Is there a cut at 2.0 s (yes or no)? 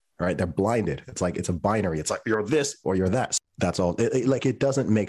no